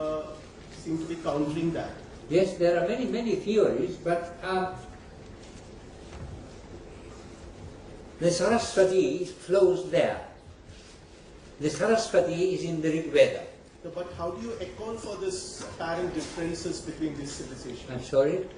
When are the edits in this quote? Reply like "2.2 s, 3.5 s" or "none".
none